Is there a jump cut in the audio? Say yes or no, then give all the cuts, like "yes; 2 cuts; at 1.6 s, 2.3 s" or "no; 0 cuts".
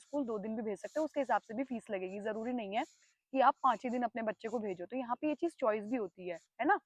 no; 0 cuts